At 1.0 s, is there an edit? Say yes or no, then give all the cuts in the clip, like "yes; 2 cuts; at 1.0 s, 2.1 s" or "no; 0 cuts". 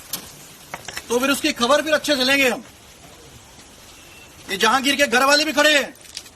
no; 1 cut; at 5.3 s